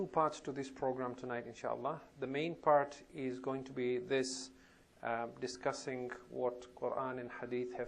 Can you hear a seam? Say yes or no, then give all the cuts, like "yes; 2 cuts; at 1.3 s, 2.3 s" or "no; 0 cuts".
yes; 1 cut; at 2.9 s